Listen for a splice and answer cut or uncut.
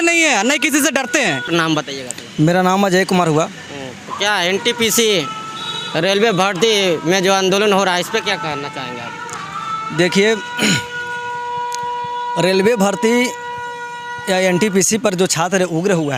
uncut